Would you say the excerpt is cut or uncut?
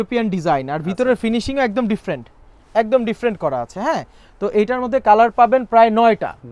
uncut